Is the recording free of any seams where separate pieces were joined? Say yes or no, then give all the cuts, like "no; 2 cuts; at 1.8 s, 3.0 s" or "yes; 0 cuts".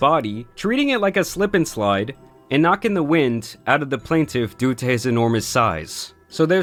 yes; 0 cuts